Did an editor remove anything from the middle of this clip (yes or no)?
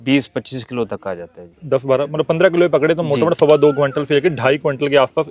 no